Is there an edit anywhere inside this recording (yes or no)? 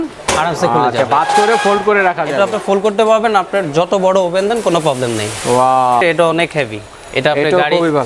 yes